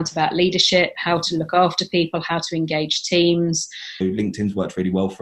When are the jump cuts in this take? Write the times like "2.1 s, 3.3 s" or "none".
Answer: 3.9 s